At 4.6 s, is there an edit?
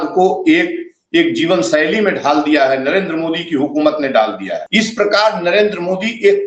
yes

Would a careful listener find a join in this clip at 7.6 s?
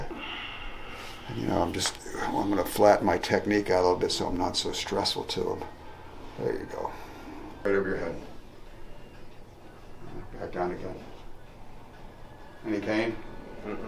yes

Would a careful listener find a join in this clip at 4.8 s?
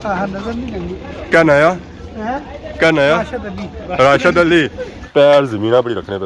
yes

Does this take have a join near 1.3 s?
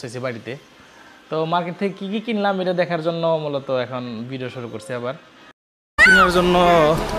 no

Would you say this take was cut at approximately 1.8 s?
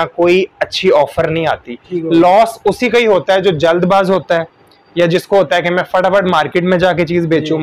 yes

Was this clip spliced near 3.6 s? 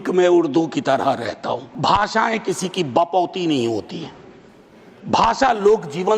no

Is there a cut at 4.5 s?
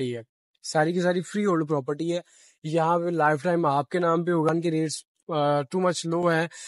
yes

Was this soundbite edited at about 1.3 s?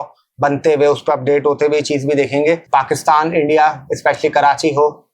no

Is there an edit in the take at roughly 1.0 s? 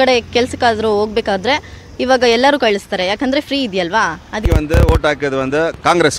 no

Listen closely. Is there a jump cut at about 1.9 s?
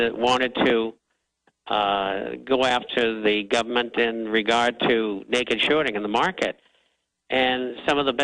yes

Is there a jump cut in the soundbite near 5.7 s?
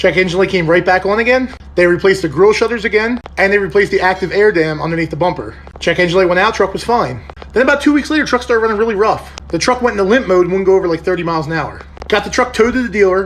no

